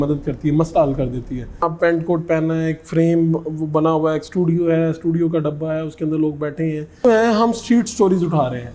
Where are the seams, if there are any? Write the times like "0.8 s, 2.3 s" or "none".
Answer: 1.6 s, 7.0 s